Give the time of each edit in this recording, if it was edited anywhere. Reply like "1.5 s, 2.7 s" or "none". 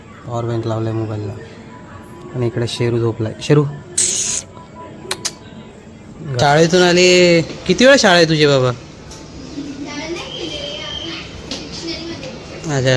2.5 s, 6.4 s